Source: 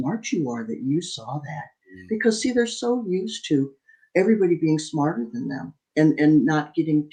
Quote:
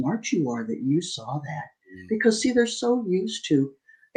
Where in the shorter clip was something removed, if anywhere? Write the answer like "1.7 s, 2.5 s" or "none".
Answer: none